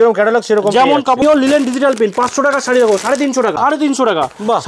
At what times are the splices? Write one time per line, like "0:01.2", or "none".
0:01.2
0:03.6